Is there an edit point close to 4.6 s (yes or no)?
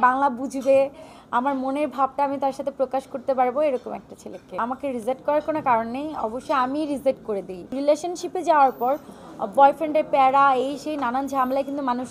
yes